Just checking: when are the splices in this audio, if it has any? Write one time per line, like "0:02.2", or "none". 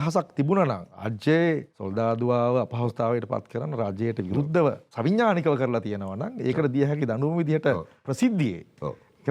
0:00.9
0:01.8
0:04.9
0:08.0